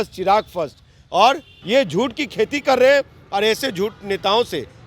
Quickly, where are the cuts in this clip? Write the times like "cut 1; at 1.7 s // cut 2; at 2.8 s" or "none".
cut 1; at 1.5 s